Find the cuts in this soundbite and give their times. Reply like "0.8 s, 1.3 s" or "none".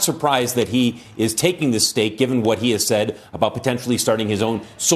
none